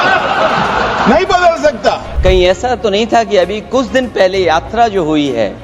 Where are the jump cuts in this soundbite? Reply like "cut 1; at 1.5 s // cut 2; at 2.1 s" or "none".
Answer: cut 1; at 2.1 s